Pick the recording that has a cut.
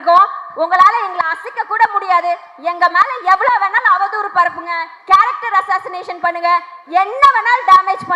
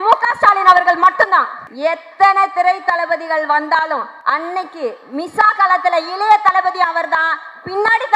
second; 2 cuts; at 1.6 s, 4.1 s

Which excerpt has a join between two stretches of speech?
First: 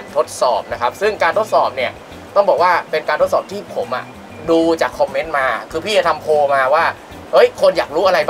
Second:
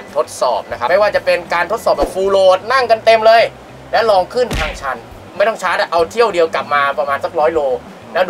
second; 2 cuts; at 0.9 s, 5.2 s

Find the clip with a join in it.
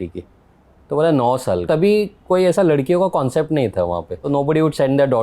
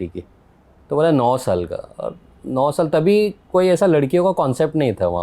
first; 2 cuts; at 1.6 s, 4.1 s

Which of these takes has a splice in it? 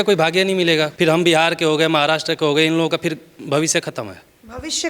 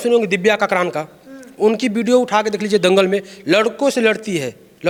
first; 1 cut; at 0.9 s

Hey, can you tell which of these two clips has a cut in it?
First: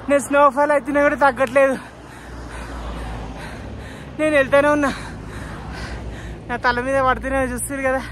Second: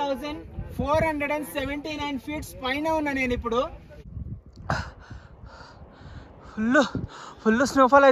second; 1 cut; at 4.2 s

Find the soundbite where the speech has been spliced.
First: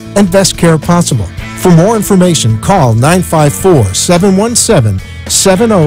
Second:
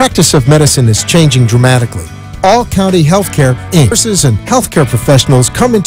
second; 1 cut; at 4.0 s

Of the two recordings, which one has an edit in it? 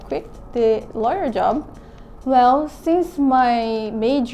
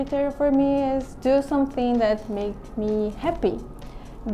first; 1 cut; at 1.7 s

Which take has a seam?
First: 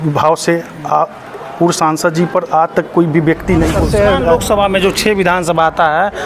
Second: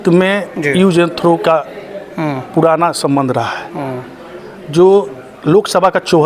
first; 1 cut; at 3.9 s

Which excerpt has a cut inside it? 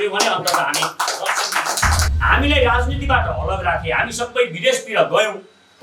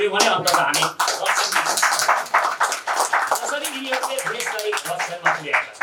first; 1 cut; at 2.0 s

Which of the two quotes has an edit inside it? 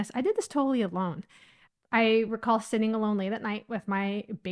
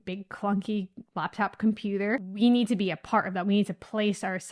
second; 1 cut; at 2.4 s

